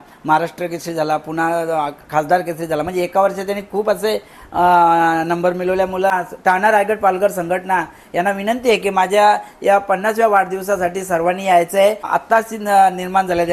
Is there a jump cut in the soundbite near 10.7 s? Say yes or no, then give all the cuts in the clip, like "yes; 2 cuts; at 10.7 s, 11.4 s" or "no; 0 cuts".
no; 2 cuts; at 6.1 s, 12.1 s